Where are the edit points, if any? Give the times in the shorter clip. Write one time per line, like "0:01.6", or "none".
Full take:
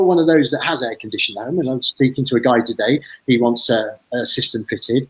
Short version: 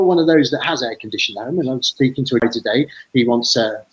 0:02.4